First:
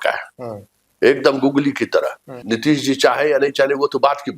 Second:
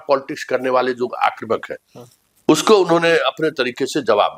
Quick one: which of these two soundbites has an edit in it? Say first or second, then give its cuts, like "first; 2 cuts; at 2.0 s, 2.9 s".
first; 1 cut; at 2.3 s